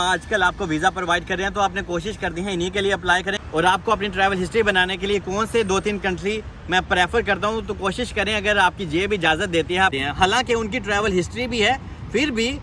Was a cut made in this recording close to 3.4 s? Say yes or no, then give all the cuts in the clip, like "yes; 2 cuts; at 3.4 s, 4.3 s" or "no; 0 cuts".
yes; 2 cuts; at 3.4 s, 9.9 s